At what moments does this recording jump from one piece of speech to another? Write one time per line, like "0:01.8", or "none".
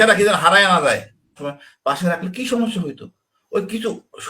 0:01.4